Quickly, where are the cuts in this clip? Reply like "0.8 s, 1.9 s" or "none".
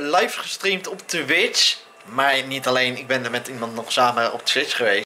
none

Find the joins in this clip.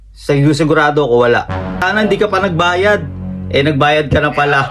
1.8 s

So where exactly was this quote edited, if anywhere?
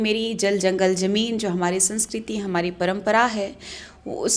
none

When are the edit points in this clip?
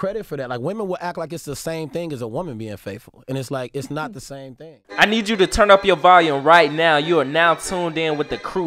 4.5 s

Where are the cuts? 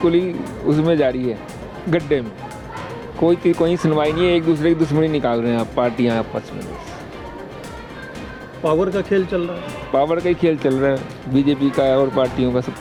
none

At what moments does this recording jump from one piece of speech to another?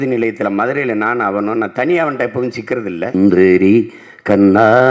3.1 s

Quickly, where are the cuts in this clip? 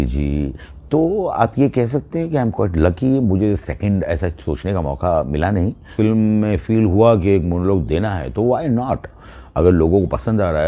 5.9 s

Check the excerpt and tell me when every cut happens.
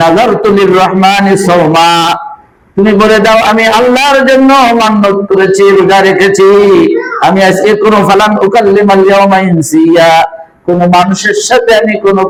none

